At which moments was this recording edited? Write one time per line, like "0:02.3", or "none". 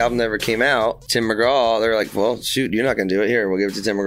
0:01.0